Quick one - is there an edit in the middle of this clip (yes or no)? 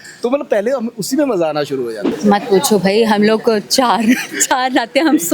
yes